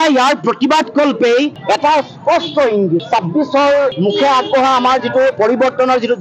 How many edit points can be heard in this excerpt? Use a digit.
1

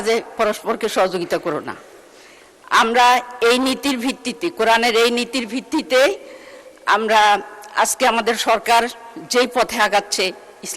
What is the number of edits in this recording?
0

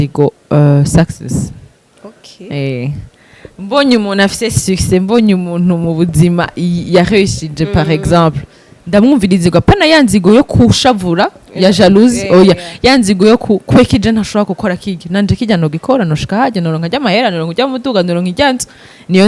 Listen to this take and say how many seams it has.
0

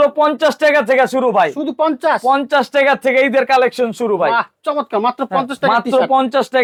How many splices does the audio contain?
0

